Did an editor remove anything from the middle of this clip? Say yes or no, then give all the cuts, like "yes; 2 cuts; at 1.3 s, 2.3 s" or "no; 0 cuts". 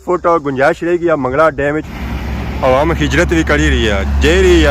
yes; 1 cut; at 1.9 s